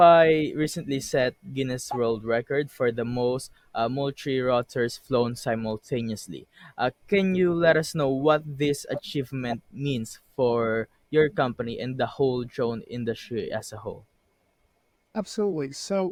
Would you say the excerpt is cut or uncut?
uncut